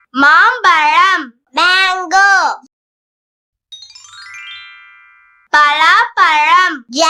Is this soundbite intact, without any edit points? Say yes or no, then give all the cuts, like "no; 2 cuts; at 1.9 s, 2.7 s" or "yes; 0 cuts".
yes; 0 cuts